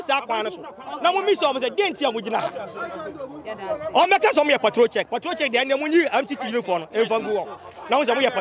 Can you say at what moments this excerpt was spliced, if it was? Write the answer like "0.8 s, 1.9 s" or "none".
none